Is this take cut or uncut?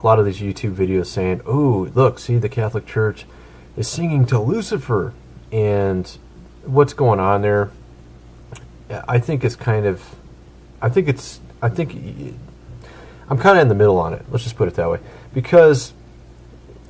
cut